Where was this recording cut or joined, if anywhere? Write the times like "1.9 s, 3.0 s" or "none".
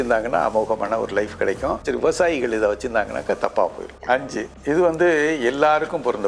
1.9 s, 4.0 s